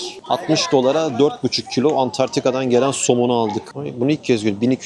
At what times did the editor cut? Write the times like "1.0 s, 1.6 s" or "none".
3.8 s